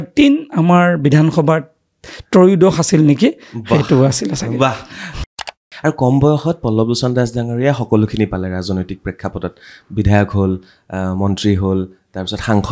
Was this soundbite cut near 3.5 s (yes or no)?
no